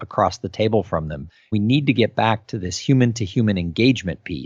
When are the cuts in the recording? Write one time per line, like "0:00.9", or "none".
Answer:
0:01.2